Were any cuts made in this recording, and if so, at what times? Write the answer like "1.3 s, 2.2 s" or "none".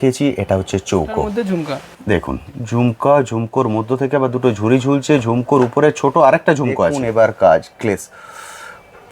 1.3 s, 7.0 s